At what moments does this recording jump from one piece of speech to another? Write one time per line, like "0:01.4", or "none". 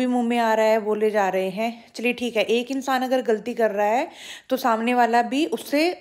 none